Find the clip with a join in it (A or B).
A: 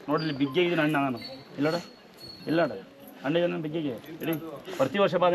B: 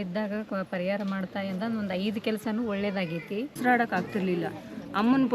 B